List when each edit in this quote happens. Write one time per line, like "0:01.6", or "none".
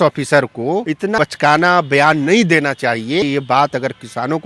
0:01.1
0:03.2